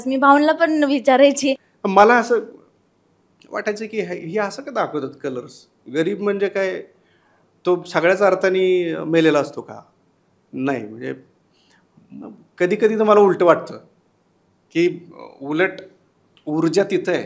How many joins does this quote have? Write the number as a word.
one